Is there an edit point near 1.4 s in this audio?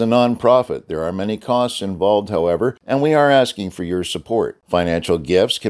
no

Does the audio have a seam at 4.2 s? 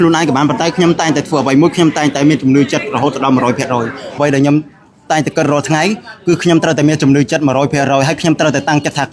yes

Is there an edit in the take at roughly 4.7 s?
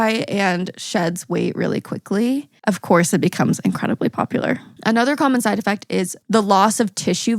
yes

